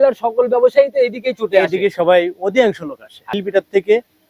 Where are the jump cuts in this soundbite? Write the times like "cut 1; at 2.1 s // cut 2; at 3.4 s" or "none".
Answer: cut 1; at 3.4 s

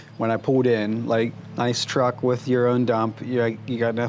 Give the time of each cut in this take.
none

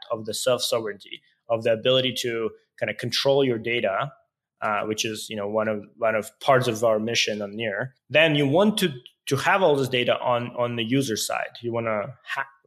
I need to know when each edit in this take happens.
cut 1; at 7.9 s

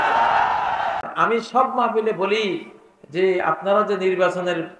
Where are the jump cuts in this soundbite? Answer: cut 1; at 1.1 s

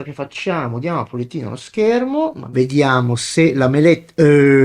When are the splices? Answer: cut 1; at 2.4 s

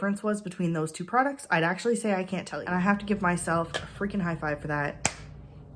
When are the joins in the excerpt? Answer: cut 1; at 2.6 s

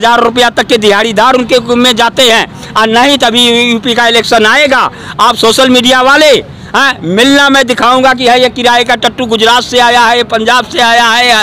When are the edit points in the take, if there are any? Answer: none

